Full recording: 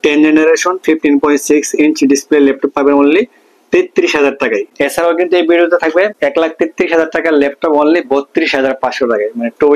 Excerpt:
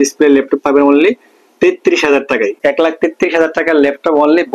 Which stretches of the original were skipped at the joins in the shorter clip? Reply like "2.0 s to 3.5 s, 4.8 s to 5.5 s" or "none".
4.7 s to 6.1 s